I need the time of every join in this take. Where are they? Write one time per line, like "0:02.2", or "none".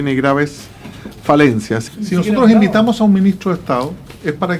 0:01.8